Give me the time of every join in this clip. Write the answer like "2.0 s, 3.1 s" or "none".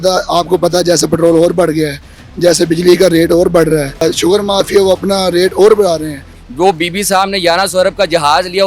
4.0 s, 6.4 s